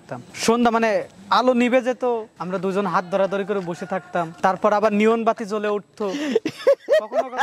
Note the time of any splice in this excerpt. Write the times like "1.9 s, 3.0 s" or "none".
2.4 s, 4.3 s